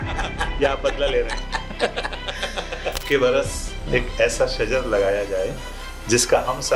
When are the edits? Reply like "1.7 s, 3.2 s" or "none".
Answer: 3.0 s